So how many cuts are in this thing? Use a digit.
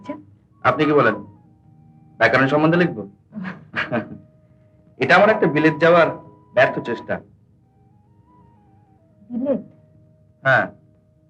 0